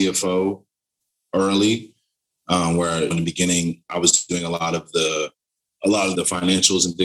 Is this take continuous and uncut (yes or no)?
no